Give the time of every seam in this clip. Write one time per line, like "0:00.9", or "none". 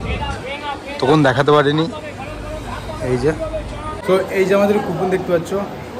0:04.0